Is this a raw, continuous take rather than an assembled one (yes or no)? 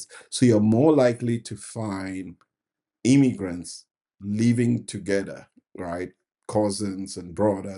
yes